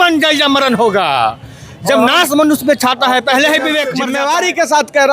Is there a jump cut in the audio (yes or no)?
yes